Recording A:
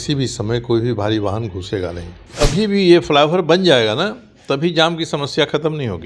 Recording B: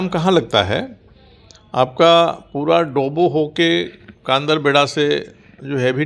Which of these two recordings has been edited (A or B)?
A